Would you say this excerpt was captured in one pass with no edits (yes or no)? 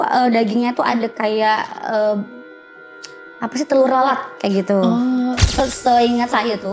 no